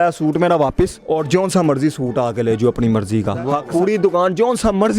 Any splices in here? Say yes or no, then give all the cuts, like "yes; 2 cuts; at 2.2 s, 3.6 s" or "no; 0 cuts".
yes; 2 cuts; at 1.0 s, 3.6 s